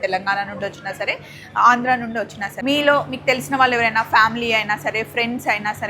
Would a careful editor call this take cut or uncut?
cut